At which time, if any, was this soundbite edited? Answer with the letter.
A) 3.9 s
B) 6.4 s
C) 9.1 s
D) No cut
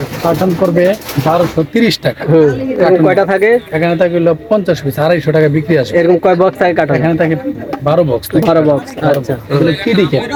D